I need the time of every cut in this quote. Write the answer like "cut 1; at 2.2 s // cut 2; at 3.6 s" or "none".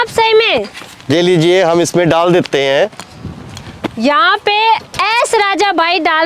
cut 1; at 2.9 s